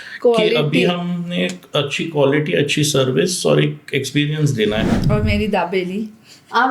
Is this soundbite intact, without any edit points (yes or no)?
no